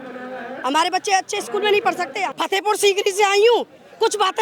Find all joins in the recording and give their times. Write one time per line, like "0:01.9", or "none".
0:02.3